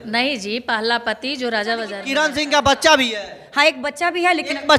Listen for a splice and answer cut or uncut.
cut